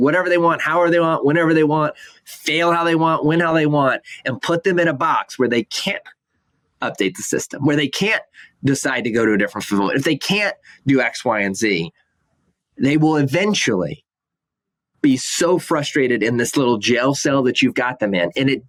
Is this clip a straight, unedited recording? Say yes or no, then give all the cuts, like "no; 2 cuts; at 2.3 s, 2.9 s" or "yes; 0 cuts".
yes; 0 cuts